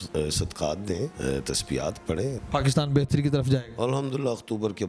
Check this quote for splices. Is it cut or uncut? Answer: cut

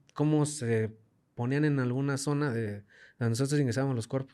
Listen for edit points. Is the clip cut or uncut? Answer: uncut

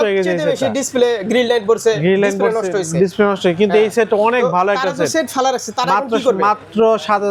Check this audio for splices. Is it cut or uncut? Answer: uncut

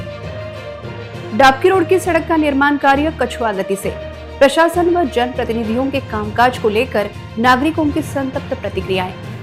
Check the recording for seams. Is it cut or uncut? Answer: uncut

